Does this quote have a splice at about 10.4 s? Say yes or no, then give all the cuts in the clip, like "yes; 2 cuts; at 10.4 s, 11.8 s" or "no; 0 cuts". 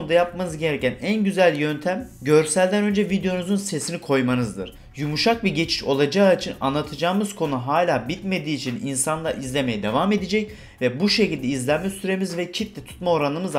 no; 2 cuts; at 2.1 s, 4.7 s